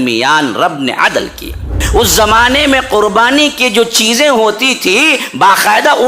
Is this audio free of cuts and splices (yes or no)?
no